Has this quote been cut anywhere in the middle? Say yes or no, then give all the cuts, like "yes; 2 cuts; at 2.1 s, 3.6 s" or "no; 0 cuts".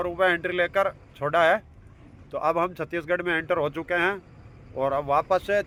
no; 0 cuts